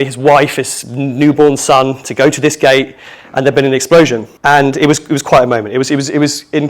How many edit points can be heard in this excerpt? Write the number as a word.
one